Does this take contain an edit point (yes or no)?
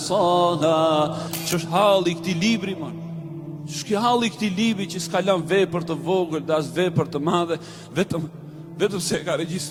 no